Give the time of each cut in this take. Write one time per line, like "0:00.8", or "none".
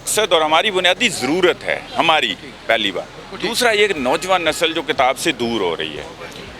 none